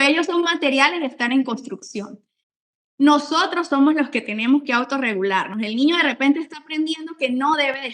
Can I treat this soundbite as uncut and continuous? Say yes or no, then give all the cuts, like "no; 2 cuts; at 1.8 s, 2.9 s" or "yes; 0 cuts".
no; 1 cut; at 2.4 s